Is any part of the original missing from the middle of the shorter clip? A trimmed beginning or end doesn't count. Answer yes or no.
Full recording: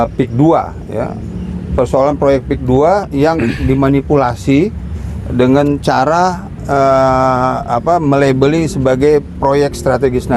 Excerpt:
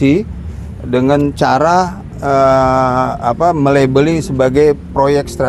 no